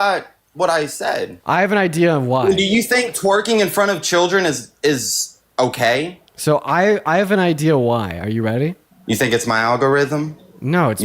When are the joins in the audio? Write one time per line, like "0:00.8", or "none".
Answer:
0:01.3